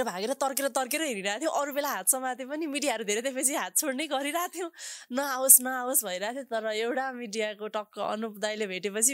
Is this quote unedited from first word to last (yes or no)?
yes